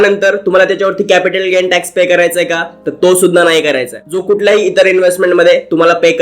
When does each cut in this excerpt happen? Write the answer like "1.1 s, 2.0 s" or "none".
none